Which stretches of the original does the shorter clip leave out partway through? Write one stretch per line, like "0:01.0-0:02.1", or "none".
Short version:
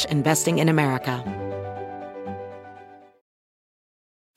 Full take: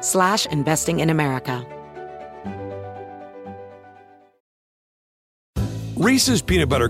0:01.6-0:02.4